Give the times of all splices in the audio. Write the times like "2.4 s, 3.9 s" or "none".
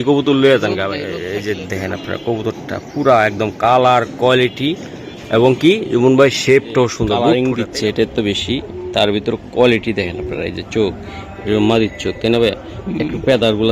1.1 s, 7.1 s